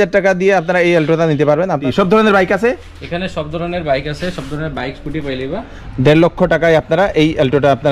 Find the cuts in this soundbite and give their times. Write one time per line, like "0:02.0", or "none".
0:01.8
0:05.7